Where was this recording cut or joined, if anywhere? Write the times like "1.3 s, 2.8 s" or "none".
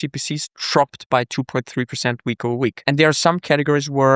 2.8 s